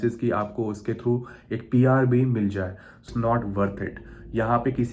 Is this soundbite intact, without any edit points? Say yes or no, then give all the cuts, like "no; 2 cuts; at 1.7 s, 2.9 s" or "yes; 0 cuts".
no; 1 cut; at 3.1 s